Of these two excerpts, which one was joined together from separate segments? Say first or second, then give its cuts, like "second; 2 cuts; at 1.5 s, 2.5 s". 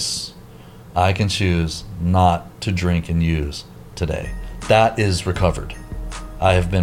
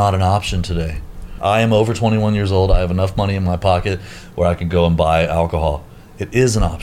second; 1 cut; at 1.4 s